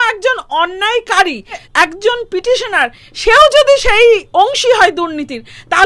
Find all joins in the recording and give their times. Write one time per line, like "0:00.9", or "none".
0:01.6